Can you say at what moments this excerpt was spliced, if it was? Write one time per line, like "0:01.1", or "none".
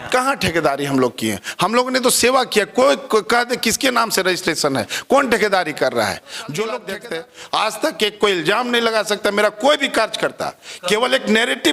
0:06.9